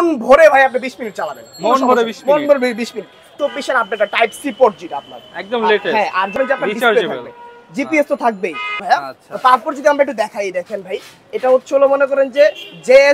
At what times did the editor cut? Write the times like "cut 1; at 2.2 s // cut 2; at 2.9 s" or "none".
cut 1; at 3.2 s // cut 2; at 6.3 s // cut 3; at 8.8 s